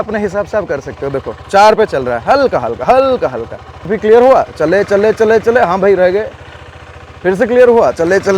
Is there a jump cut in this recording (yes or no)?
yes